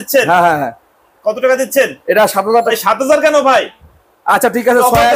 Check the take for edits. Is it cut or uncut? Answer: cut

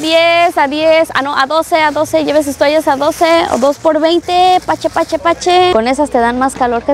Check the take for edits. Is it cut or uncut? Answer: cut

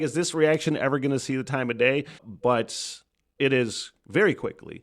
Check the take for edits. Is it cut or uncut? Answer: cut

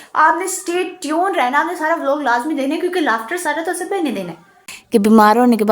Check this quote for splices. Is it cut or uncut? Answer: cut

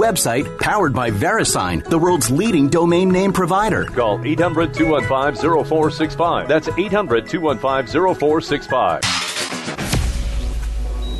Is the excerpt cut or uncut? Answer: cut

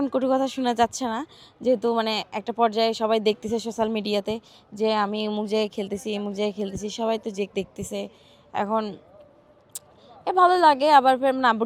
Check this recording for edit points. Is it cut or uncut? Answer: uncut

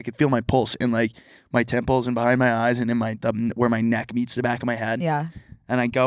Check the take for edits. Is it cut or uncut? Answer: uncut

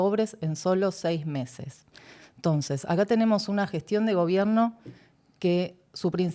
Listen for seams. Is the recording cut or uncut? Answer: uncut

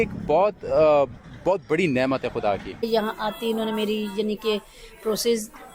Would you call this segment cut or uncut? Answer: cut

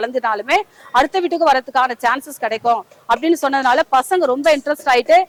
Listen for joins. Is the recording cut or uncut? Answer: uncut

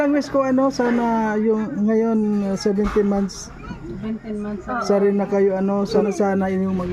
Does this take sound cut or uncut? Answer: cut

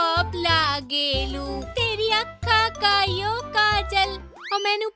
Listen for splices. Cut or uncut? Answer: cut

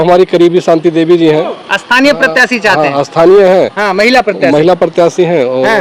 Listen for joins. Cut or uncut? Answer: uncut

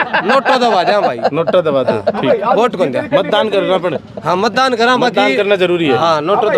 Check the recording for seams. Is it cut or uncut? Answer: uncut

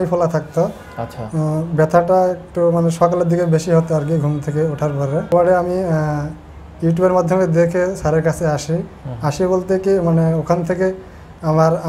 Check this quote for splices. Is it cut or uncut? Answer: cut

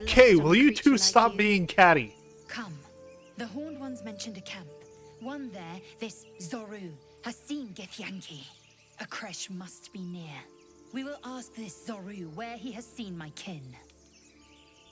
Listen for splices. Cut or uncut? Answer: uncut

